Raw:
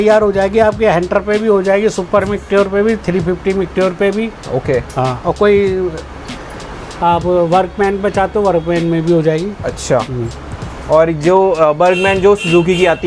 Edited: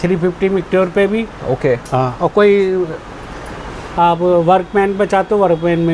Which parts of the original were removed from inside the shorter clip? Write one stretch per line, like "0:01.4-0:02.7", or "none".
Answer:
none